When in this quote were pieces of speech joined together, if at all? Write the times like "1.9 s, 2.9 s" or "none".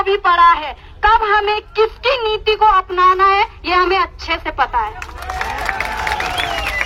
none